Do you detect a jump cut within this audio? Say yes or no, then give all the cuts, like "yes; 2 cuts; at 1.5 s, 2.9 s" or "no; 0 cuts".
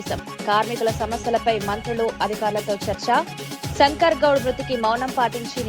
no; 0 cuts